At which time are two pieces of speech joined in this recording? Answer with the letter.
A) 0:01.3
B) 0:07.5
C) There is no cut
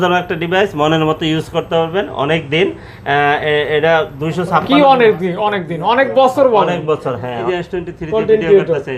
B